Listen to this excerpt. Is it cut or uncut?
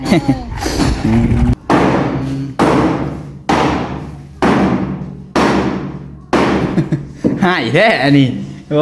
cut